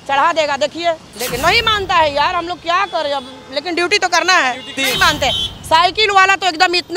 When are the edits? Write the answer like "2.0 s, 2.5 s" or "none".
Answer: 1.1 s, 4.7 s